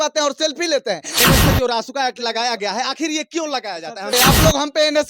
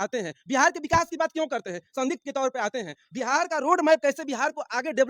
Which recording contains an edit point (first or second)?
first